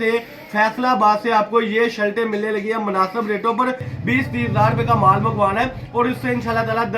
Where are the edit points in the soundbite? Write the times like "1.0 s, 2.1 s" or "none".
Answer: 3.9 s